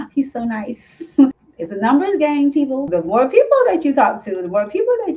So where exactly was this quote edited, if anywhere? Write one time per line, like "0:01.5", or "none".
0:01.3
0:02.8